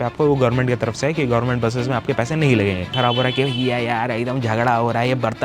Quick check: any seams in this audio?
yes; 1 cut; at 2.9 s

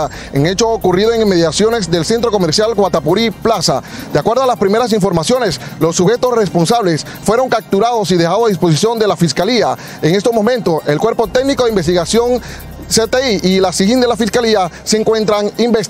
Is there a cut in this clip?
no; 0 cuts

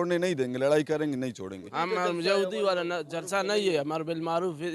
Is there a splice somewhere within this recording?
yes; 1 cut; at 1.7 s

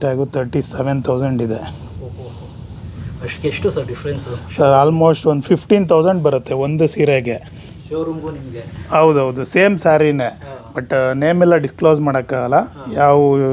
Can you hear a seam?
no; 0 cuts

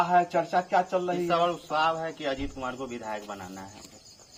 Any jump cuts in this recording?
no; 0 cuts

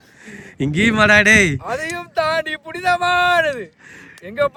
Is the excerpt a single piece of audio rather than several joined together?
yes; 0 cuts

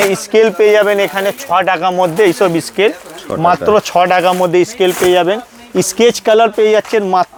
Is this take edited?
no; 0 cuts

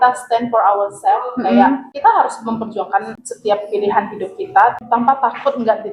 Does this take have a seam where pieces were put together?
no; 0 cuts

